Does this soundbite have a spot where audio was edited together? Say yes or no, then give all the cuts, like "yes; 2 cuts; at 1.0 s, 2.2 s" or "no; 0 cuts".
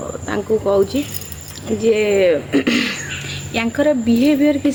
no; 0 cuts